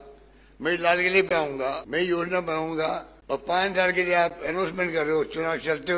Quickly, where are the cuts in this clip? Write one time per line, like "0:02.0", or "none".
0:01.8
0:03.1